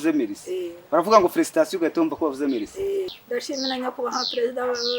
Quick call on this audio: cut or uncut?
cut